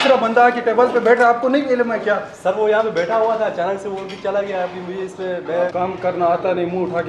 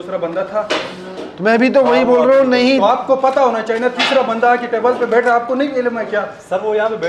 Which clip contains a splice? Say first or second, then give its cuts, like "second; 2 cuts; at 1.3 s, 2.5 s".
first; 1 cut; at 5.7 s